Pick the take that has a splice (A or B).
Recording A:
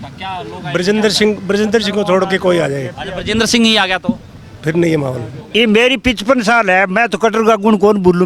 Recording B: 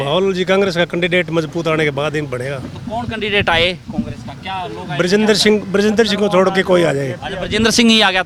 A